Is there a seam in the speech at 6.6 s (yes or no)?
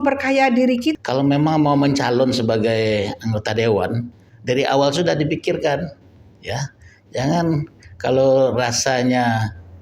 no